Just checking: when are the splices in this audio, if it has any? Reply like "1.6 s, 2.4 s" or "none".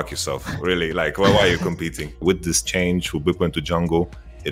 none

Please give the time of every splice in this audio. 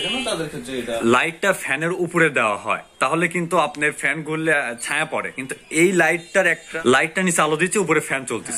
1.0 s, 6.7 s

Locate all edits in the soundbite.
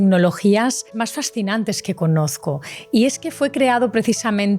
0.9 s

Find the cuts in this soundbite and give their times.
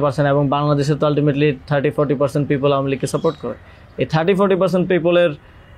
none

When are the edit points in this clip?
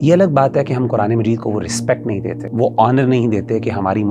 2.4 s

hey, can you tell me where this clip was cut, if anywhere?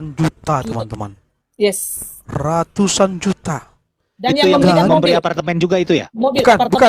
none

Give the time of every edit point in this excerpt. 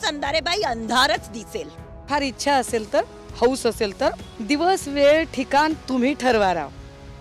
2.1 s, 4.3 s

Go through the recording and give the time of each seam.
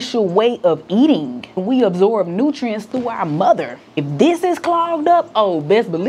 1.6 s, 4.1 s

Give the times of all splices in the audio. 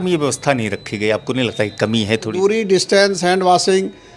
2.3 s

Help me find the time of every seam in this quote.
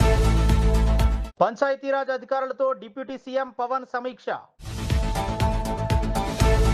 1.1 s

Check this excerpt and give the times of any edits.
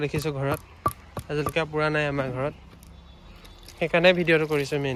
none

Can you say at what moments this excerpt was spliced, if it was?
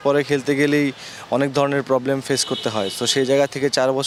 none

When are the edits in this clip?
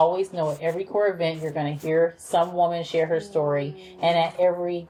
none

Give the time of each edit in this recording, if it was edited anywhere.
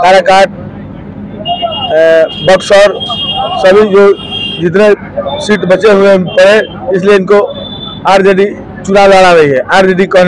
none

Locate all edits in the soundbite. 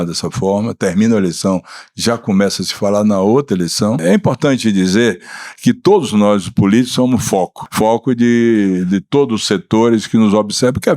4.0 s, 7.6 s

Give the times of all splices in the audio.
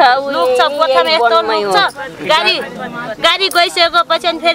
none

